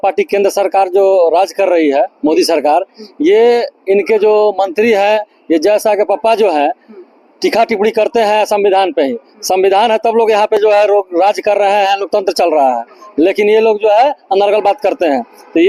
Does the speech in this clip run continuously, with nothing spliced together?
yes; 0 cuts

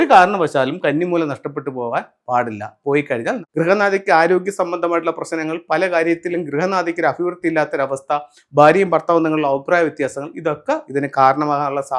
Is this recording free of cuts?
no; 1 cut; at 3.4 s

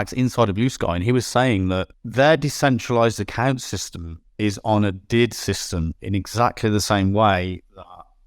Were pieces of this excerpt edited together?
yes; 1 cut; at 2.0 s

